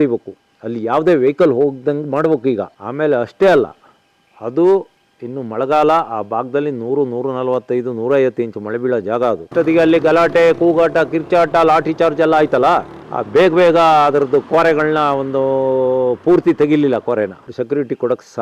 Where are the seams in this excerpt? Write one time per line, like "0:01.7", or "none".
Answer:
0:09.5
0:17.5